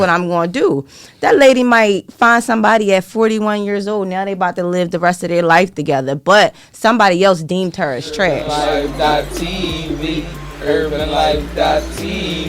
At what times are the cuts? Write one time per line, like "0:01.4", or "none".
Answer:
0:08.4